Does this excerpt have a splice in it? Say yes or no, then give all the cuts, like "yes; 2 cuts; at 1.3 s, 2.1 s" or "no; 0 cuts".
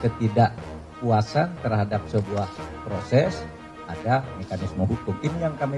no; 0 cuts